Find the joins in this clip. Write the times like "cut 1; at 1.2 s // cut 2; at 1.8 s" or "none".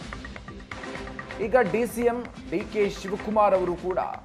cut 1; at 1.4 s